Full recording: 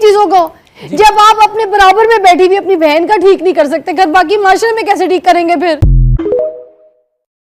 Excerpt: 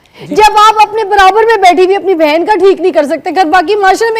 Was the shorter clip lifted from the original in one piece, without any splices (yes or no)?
yes